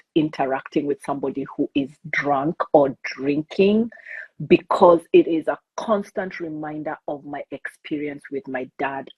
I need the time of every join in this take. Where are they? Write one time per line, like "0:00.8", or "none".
none